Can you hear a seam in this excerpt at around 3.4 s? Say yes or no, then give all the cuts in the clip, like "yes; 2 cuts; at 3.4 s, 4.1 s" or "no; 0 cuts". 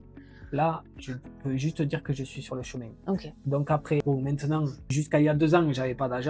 no; 0 cuts